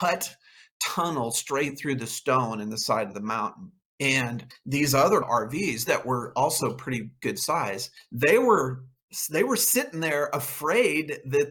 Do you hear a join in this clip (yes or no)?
no